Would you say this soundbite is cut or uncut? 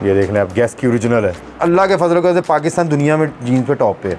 cut